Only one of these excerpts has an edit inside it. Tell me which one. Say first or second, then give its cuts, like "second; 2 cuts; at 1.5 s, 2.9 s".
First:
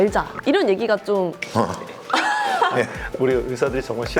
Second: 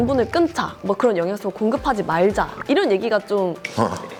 first; 1 cut; at 3.0 s